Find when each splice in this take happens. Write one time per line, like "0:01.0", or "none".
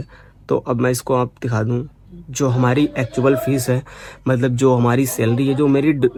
none

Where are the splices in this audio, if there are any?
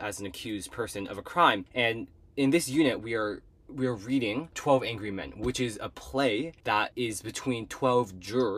0:01.7
0:04.6
0:06.8

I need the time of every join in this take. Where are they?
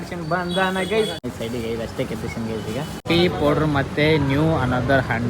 0:01.2
0:03.0

